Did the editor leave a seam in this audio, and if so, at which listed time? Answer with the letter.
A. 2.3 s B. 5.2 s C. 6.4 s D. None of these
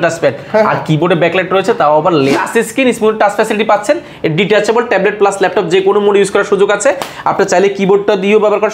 A